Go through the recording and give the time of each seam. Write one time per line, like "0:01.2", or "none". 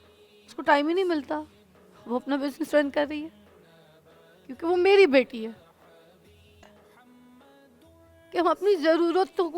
0:06.5